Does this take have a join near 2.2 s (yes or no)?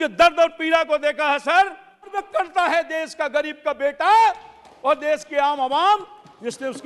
yes